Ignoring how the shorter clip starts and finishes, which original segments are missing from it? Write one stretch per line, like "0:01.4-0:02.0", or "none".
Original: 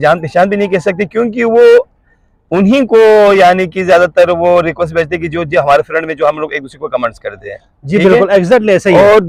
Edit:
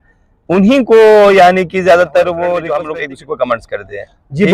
0:04.8-0:06.3